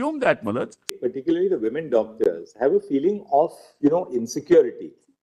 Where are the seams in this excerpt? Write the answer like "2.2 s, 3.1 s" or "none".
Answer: 1.0 s